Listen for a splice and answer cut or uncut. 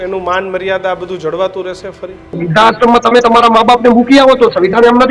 cut